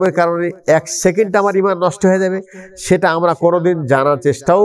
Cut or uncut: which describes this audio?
uncut